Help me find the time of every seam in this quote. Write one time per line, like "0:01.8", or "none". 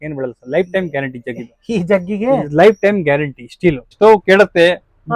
0:04.0